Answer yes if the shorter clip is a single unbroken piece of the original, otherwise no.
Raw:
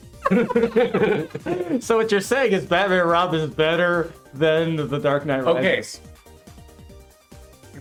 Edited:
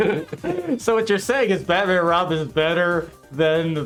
yes